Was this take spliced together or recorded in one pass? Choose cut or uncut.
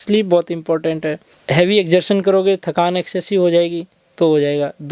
cut